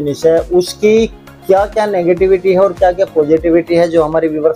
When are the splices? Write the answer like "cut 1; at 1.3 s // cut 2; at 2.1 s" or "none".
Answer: none